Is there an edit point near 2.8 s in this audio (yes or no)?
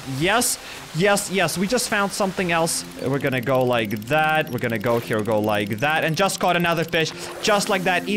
yes